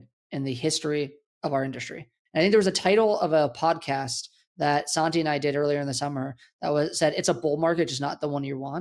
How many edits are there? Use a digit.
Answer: 1